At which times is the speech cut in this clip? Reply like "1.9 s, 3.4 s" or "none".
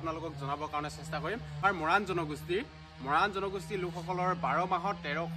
1.6 s